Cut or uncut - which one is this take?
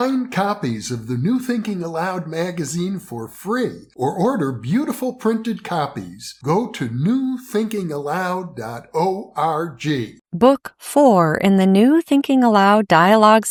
uncut